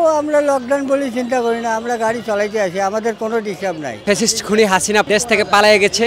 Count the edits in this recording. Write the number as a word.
two